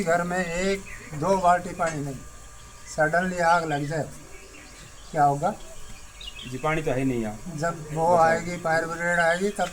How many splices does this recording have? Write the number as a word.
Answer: zero